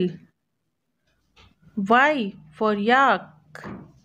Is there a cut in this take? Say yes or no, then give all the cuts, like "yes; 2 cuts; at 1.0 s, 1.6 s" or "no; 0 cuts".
yes; 1 cut; at 3.0 s